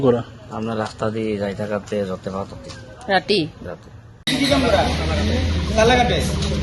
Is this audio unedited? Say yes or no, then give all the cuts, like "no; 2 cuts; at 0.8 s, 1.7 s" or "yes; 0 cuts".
no; 1 cut; at 4.3 s